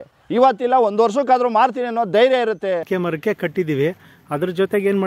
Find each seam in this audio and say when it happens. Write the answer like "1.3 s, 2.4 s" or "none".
2.9 s